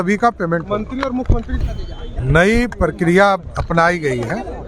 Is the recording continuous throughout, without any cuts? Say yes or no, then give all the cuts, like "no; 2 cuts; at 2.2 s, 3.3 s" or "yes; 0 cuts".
no; 1 cut; at 1.7 s